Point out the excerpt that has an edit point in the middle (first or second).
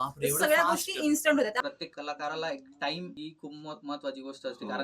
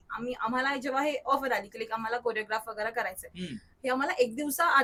first